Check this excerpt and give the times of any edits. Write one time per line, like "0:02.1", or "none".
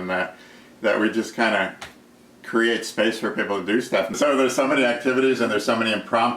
0:04.2